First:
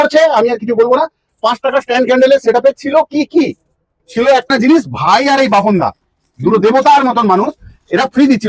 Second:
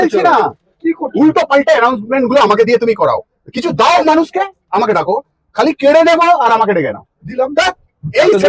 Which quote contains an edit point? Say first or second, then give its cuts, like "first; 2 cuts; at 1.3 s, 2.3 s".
first; 1 cut; at 4.5 s